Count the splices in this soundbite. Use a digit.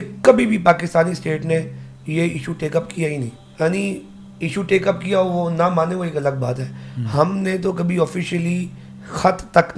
1